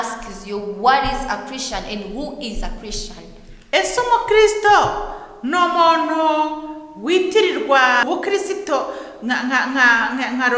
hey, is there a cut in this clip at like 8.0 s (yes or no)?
yes